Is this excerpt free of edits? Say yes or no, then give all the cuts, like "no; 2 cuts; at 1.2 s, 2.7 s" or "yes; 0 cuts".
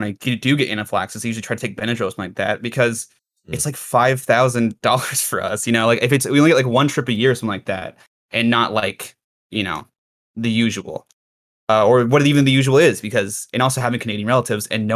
yes; 0 cuts